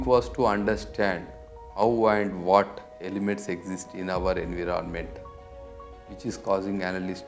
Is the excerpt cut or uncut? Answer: uncut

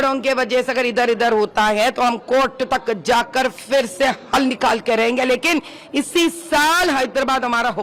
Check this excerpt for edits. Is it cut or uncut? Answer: uncut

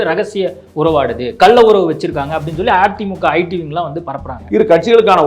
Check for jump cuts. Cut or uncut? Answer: cut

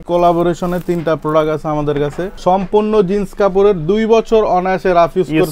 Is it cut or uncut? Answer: cut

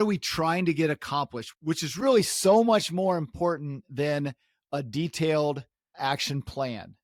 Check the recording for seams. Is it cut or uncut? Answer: uncut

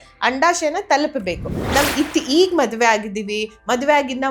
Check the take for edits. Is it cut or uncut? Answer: cut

